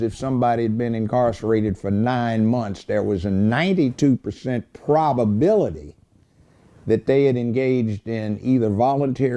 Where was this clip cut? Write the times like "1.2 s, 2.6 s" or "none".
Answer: 1.0 s